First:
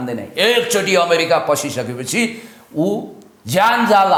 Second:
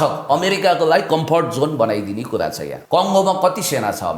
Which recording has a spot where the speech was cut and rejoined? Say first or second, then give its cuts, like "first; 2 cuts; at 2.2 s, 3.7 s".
second; 1 cut; at 2.7 s